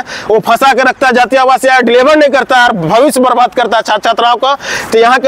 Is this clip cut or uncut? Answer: uncut